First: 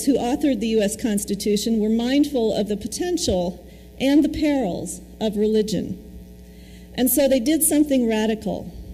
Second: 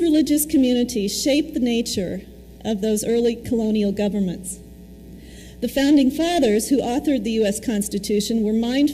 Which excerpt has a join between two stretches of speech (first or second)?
second